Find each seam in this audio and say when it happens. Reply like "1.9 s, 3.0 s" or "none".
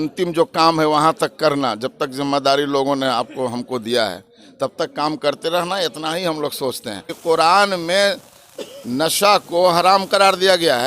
7.1 s